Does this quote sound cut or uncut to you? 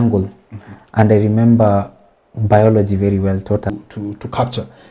cut